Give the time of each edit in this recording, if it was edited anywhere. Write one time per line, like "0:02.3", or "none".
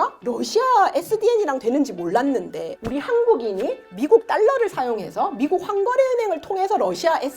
0:02.8